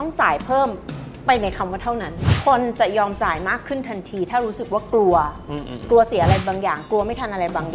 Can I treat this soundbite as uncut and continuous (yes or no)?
no